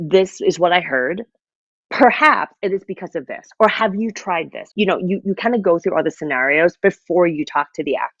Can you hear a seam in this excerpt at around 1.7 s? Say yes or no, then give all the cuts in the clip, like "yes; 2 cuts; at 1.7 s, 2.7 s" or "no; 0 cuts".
no; 1 cut; at 4.6 s